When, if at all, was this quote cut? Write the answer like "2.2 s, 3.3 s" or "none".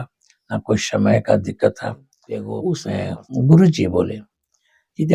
2.6 s